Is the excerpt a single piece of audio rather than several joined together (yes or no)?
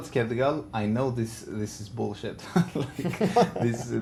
yes